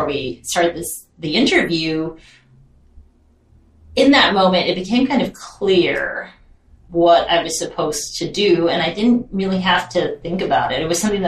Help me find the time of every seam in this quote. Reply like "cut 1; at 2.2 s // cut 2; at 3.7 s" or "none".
cut 1; at 6.8 s